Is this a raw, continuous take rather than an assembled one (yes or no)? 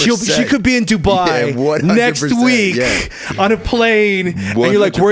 yes